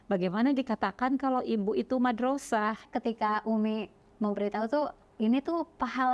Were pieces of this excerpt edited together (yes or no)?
yes